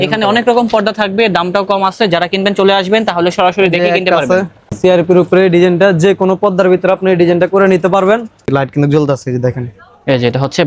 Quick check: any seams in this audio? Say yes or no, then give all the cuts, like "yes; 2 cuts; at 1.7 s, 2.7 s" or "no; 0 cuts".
yes; 2 cuts; at 4.7 s, 8.5 s